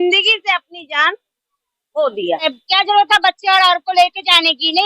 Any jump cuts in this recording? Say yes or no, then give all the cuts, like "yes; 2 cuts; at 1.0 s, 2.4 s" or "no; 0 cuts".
yes; 1 cut; at 2.5 s